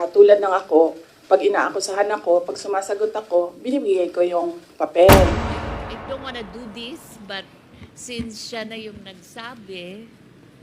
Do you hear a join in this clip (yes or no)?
yes